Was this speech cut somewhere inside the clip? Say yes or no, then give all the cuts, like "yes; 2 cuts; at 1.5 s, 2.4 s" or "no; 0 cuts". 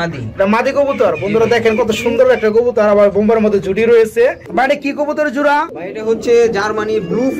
yes; 1 cut; at 4.4 s